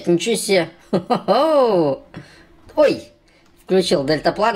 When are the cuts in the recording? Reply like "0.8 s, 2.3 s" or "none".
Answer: none